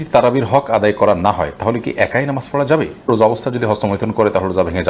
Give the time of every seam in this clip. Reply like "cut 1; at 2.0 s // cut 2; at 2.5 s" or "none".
cut 1; at 3.1 s